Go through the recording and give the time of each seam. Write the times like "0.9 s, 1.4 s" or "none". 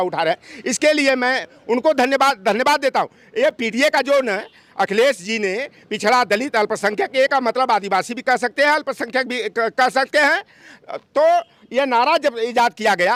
none